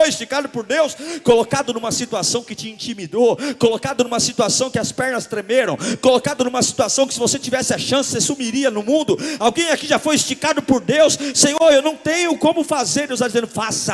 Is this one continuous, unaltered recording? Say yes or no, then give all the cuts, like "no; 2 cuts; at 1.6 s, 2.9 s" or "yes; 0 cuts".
yes; 0 cuts